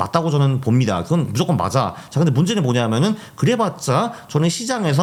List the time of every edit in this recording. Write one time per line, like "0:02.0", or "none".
none